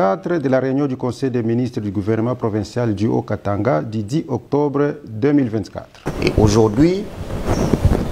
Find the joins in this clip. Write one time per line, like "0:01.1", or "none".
0:06.0